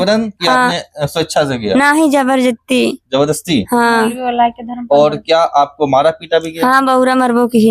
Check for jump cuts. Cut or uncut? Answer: uncut